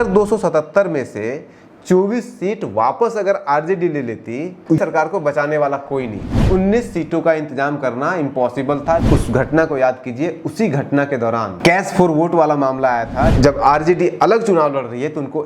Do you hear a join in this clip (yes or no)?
yes